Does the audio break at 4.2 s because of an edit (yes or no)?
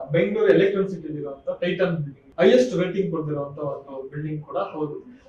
no